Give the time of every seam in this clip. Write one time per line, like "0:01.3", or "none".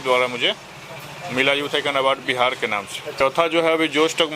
0:03.0